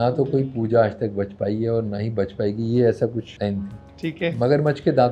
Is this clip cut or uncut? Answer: cut